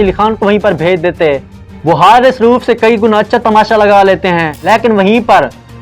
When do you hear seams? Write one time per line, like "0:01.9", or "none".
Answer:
0:04.5

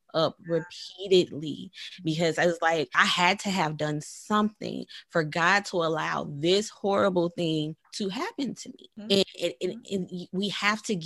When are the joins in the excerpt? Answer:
0:02.9
0:08.9

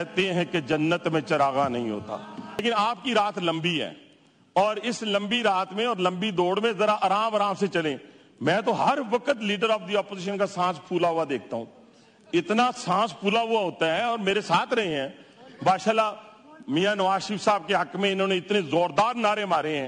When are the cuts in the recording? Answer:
0:02.6

